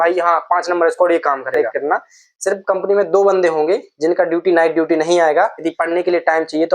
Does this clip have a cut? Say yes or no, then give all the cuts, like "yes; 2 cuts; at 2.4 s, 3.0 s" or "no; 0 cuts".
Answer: yes; 2 cuts; at 1.6 s, 5.6 s